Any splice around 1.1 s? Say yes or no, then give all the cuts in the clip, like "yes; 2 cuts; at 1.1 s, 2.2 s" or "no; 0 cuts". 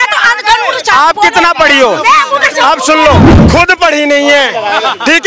no; 1 cut; at 3.3 s